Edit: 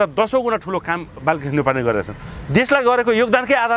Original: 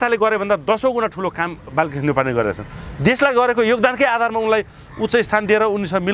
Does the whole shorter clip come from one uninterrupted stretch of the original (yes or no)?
yes